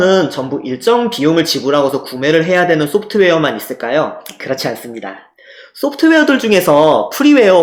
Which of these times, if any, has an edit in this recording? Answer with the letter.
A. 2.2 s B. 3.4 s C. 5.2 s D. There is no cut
D